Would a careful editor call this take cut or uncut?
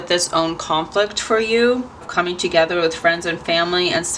cut